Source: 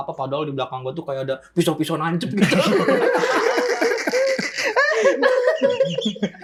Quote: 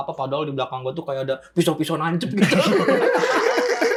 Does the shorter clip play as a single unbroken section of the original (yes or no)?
yes